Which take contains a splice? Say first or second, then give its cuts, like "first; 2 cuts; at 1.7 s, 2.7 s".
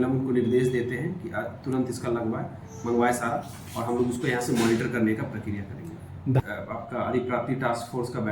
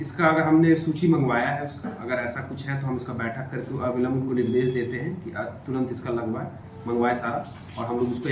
first; 1 cut; at 6.4 s